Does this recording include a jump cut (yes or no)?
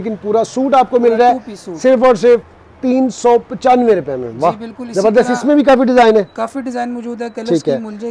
no